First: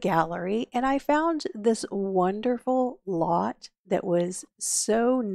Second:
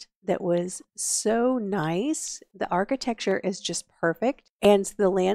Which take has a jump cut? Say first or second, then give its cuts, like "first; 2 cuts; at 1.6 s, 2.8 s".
second; 2 cuts; at 2.7 s, 4.5 s